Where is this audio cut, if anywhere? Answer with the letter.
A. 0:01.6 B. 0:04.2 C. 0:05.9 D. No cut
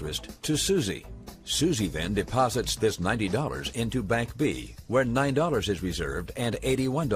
D